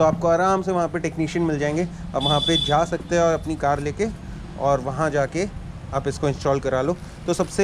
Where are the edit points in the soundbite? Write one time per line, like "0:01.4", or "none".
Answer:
none